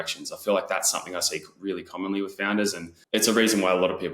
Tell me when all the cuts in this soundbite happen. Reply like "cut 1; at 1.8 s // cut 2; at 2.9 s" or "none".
cut 1; at 2.9 s